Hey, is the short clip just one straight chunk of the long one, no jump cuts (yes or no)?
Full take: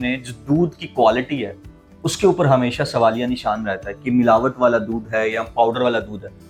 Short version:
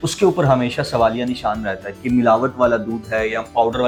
yes